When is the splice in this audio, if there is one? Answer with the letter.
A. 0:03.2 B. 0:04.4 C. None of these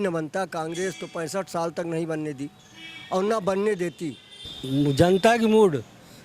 B